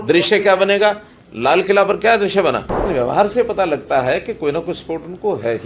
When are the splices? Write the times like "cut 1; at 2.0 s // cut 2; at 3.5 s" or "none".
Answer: cut 1; at 2.7 s